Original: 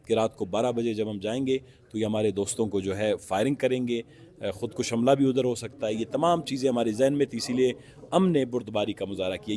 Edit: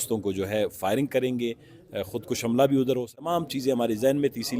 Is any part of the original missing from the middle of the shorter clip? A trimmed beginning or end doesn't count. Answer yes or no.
yes